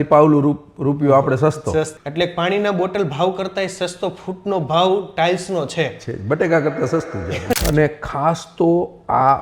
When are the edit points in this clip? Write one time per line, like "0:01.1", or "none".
0:02.0
0:07.5